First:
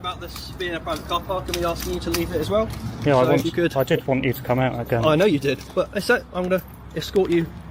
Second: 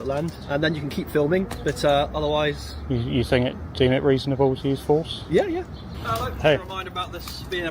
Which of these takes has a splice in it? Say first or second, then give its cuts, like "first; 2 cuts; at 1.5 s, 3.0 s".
second; 1 cut; at 6.0 s